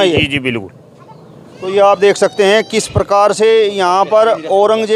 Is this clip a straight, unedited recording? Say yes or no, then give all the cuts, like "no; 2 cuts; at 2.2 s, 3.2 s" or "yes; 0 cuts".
yes; 0 cuts